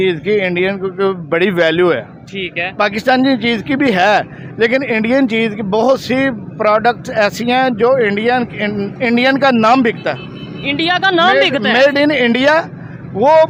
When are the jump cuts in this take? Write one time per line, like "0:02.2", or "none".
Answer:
none